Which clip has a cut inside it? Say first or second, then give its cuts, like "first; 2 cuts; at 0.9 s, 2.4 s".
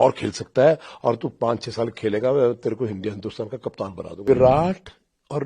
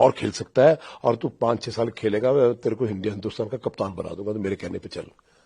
first; 1 cut; at 4.2 s